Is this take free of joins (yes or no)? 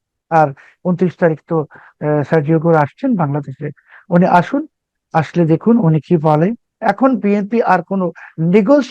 no